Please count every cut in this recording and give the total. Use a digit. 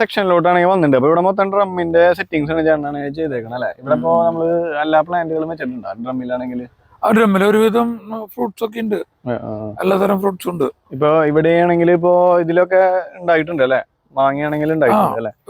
0